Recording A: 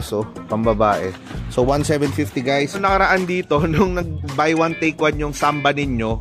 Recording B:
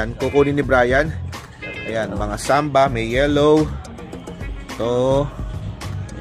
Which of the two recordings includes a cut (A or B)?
A